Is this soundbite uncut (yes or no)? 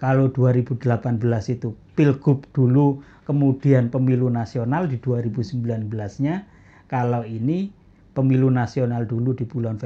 yes